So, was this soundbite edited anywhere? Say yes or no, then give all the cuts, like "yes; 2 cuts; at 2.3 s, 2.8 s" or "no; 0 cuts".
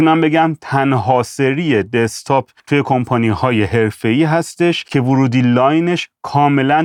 no; 0 cuts